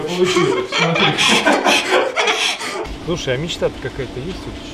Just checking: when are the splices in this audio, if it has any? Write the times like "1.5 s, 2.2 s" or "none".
3.0 s